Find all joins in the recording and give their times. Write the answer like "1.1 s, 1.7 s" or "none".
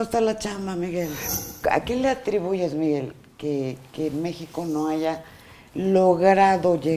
1.2 s